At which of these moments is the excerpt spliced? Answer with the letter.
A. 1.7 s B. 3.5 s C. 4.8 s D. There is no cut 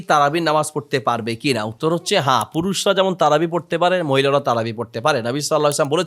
D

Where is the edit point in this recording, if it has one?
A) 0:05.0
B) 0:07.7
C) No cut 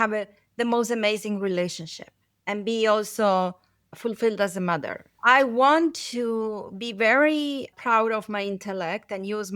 A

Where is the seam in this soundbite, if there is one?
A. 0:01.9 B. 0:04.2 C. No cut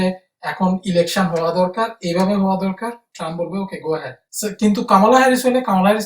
B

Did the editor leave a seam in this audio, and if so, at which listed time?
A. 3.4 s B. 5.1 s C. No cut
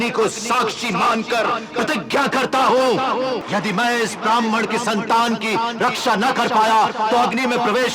A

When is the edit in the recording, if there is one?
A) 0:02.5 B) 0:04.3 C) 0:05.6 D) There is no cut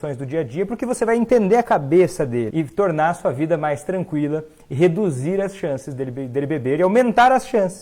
A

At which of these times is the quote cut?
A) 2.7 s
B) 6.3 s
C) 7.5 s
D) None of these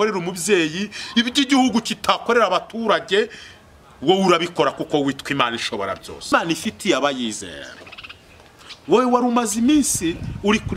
B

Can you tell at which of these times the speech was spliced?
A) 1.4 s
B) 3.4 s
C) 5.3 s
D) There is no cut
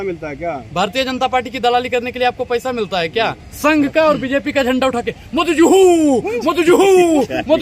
B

